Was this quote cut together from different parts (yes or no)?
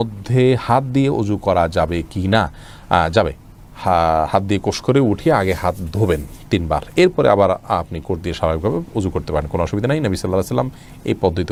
no